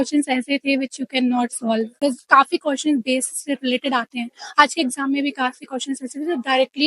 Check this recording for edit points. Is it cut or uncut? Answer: cut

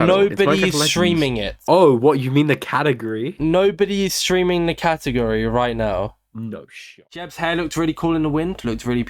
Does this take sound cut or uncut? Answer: cut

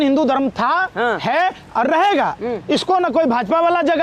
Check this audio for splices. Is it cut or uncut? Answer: uncut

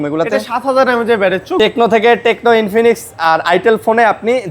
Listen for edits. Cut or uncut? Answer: cut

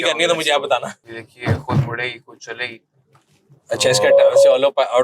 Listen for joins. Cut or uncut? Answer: cut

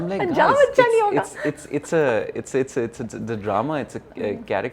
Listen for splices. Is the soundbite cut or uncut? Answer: uncut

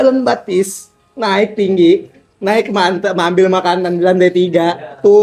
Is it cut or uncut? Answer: uncut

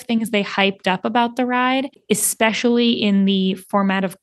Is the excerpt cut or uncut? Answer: cut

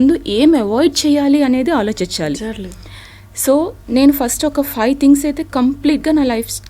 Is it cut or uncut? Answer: uncut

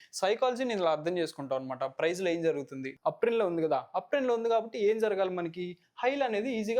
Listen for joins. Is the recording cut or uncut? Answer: cut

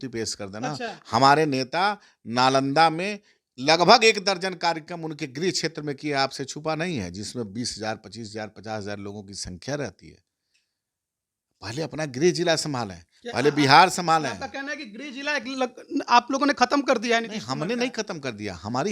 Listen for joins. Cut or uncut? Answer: uncut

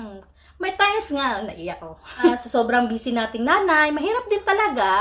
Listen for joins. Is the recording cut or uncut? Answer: cut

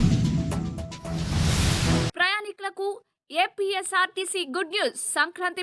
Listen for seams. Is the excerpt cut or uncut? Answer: cut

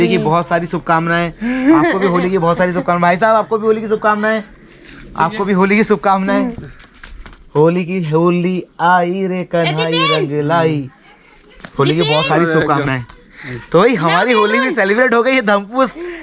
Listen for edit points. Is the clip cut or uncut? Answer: uncut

